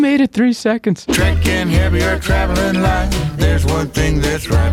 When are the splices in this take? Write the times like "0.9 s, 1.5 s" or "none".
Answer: 1.1 s